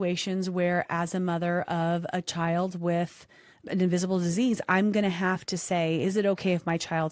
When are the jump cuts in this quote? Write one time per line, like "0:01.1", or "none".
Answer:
0:03.6
0:05.5